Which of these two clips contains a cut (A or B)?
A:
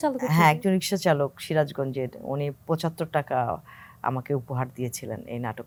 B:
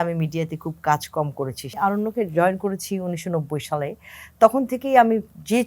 B